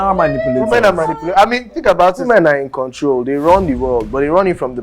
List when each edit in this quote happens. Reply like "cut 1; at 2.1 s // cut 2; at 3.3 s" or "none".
cut 1; at 2.2 s